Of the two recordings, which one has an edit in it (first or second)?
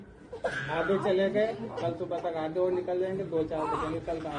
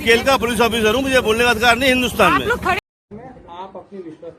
second